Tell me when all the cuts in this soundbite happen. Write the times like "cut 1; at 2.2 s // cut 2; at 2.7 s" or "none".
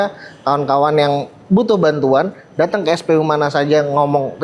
none